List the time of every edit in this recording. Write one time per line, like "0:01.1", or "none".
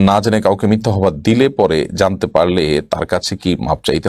none